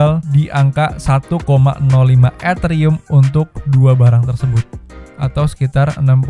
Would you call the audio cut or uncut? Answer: uncut